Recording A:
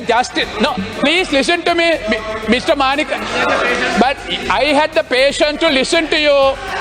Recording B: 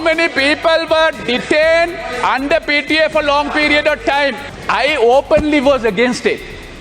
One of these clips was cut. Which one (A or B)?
B